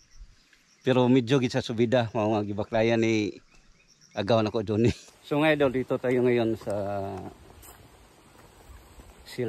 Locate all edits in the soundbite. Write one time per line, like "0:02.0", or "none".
0:05.1